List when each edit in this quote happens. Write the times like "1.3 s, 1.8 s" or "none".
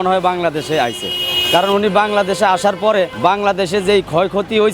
none